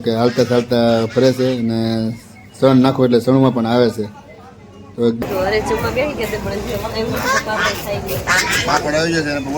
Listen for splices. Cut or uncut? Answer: cut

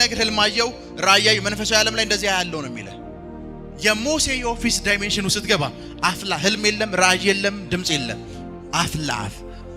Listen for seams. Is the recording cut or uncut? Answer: uncut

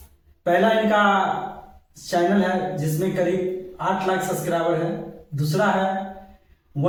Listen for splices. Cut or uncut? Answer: uncut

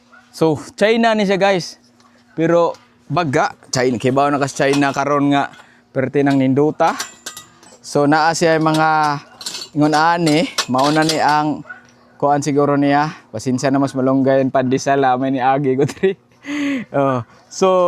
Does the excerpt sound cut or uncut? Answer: uncut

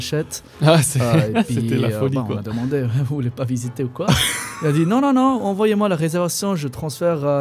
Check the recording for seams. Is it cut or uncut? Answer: uncut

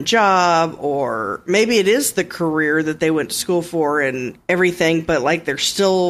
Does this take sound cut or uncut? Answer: uncut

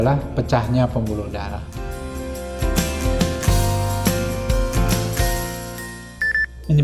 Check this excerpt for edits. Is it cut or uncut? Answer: uncut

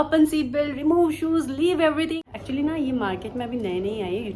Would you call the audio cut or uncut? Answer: cut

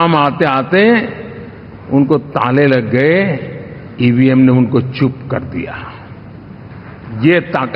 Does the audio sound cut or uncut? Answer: uncut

